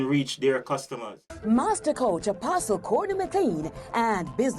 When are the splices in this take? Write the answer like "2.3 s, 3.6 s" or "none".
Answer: 1.3 s